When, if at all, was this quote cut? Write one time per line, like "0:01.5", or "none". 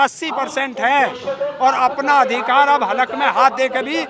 none